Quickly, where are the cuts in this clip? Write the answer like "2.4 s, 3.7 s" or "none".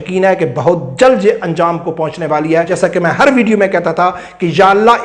2.7 s